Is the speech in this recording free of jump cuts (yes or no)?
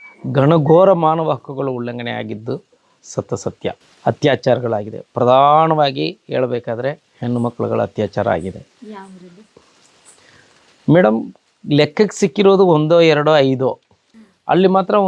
no